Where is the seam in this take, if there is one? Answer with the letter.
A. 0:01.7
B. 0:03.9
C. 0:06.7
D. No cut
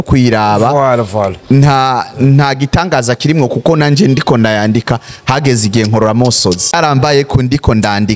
C